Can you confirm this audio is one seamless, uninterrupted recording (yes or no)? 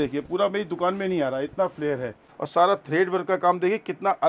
no